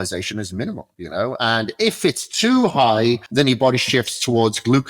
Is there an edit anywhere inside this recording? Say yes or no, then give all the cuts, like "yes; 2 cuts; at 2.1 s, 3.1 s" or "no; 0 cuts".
yes; 2 cuts; at 0.9 s, 3.2 s